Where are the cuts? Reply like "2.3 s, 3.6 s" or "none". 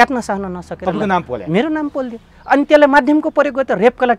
none